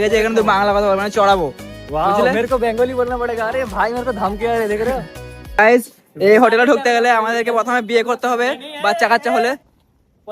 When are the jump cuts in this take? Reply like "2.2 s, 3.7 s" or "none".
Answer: 5.6 s